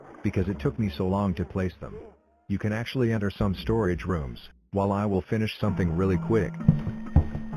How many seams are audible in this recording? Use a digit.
1